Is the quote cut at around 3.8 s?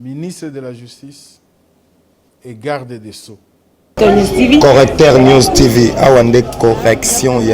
yes; 1 cut; at 3.8 s

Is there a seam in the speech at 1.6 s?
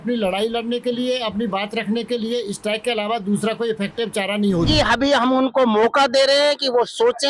no; 1 cut; at 4.7 s

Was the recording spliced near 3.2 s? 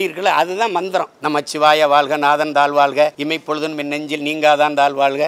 yes; 2 cuts; at 1.1 s, 3.2 s

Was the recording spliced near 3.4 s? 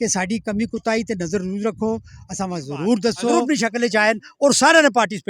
yes; 1 cut; at 3.4 s

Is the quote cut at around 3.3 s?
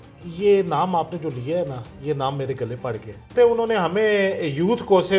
yes; 1 cut; at 3.3 s

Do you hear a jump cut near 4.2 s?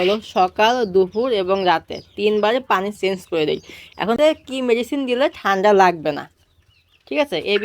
yes; 1 cut; at 4.2 s

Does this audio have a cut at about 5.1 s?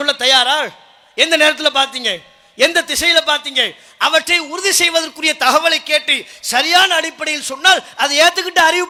no; 0 cuts

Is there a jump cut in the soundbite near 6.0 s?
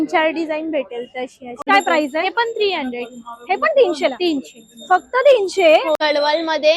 yes; 2 cuts; at 1.6 s, 6.0 s

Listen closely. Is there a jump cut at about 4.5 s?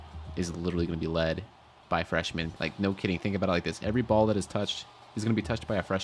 no; 1 cut; at 2.5 s

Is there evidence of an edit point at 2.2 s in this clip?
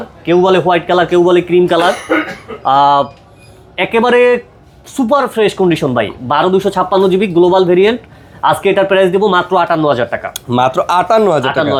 no; 0 cuts

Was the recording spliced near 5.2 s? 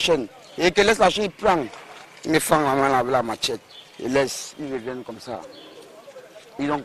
yes; 1 cut; at 5.2 s

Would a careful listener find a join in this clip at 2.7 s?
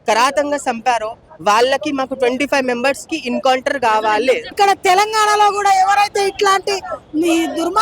no; 1 cut; at 4.5 s

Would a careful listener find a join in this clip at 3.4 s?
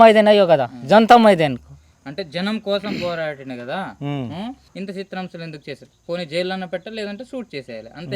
no; 1 cut; at 4.6 s

